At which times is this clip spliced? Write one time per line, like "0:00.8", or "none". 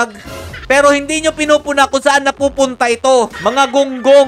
0:03.3